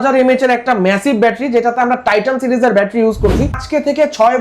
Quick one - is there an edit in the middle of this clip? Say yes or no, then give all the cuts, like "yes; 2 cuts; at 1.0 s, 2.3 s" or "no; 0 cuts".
yes; 1 cut; at 3.5 s